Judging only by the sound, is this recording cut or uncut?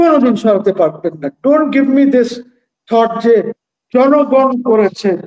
uncut